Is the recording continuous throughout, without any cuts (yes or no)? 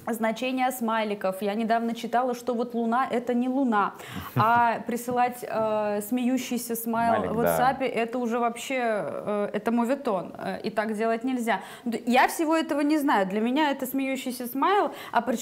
yes